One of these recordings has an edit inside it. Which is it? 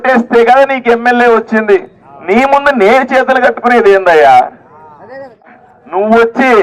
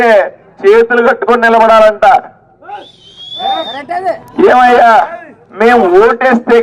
first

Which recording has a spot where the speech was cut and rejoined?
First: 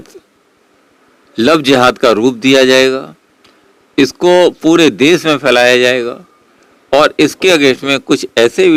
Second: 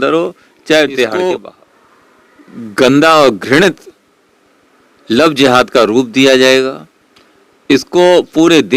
second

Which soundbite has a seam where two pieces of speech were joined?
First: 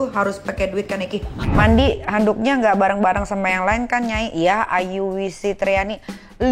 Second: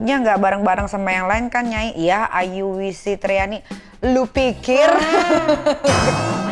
first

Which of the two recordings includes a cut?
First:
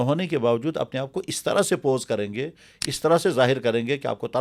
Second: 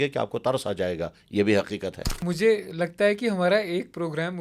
second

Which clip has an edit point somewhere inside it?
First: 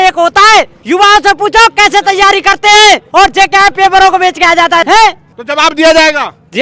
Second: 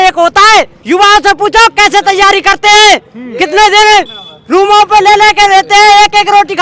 first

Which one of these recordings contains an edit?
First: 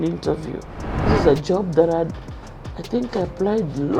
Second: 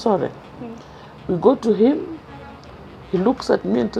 first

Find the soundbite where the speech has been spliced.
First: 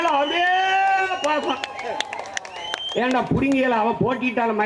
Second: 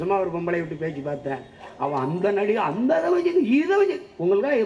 second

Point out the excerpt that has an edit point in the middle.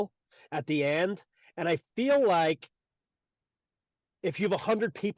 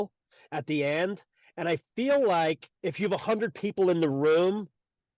second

